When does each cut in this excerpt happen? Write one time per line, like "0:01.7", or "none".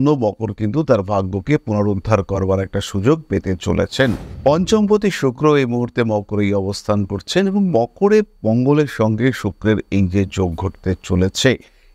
0:04.3

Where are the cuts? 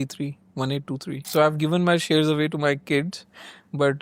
0:01.2

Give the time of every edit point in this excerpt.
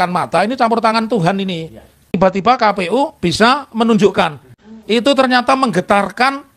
none

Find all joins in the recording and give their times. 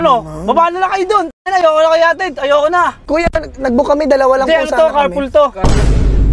0:03.0

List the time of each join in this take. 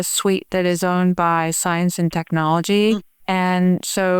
0:03.1

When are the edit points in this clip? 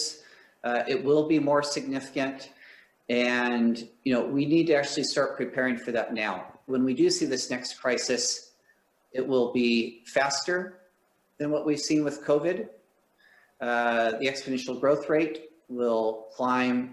0:06.7

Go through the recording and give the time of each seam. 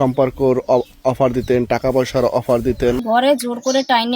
0:03.0

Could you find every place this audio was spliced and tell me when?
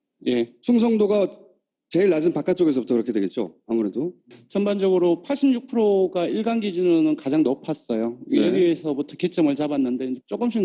0:07.0

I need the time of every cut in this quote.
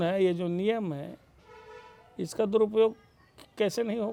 none

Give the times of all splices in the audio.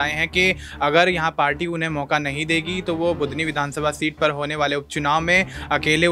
none

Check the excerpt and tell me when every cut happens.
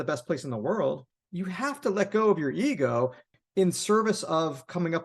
0:01.1
0:03.3

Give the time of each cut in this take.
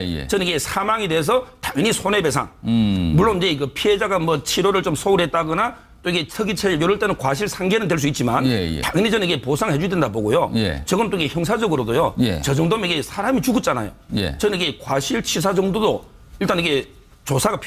0:13.1

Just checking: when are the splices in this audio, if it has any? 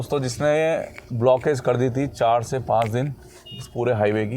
none

